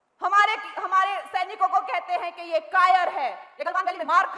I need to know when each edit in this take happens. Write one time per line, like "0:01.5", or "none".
none